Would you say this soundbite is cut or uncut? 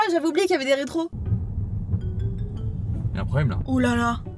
cut